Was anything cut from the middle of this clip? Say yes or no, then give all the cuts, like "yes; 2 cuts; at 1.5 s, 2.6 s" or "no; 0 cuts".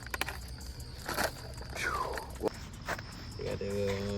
yes; 1 cut; at 2.5 s